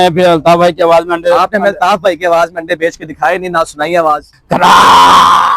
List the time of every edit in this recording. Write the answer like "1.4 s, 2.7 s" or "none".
4.3 s